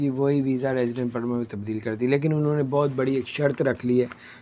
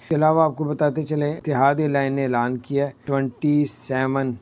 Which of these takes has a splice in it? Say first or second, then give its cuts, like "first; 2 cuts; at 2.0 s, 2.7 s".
second; 2 cuts; at 1.4 s, 3.0 s